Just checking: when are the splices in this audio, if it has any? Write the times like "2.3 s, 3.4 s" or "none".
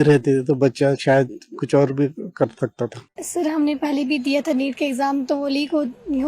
3.2 s